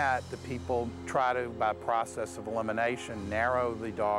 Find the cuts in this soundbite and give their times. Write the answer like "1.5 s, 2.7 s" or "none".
none